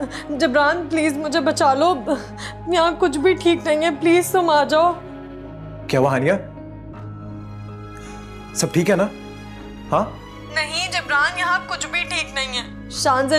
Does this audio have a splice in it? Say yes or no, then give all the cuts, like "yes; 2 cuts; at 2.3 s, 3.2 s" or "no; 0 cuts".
no; 0 cuts